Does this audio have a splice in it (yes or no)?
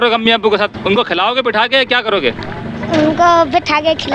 no